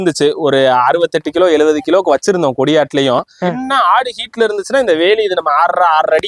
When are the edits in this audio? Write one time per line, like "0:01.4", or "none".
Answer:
0:03.6